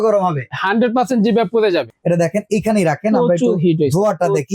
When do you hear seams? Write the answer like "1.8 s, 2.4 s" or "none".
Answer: 1.9 s